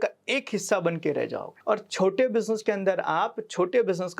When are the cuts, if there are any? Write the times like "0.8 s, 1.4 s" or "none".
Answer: 1.5 s